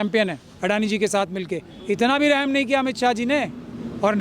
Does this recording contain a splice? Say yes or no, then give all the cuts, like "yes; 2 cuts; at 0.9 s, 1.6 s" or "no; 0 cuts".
yes; 1 cut; at 1.7 s